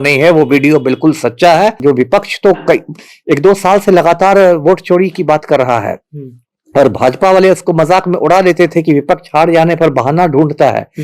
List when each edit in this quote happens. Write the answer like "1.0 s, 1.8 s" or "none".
1.8 s

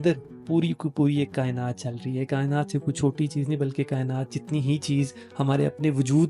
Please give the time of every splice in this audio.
none

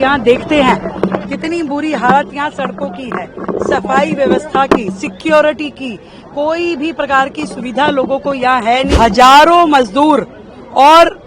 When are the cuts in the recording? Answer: 8.9 s

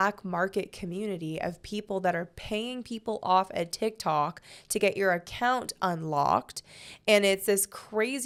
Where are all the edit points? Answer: none

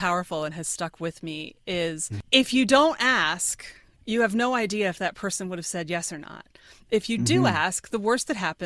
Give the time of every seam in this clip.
2.1 s

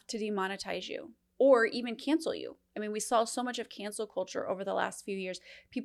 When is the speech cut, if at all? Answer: 1.2 s

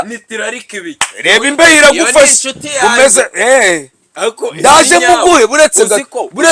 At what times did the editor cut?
none

